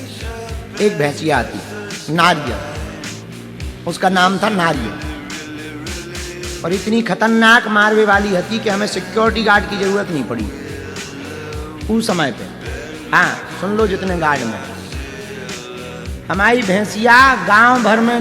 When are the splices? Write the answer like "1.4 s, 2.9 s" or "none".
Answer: 5.4 s, 6.6 s